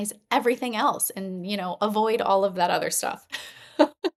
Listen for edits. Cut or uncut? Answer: uncut